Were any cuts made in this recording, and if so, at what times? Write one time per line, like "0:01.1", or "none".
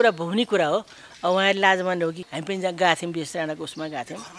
0:02.2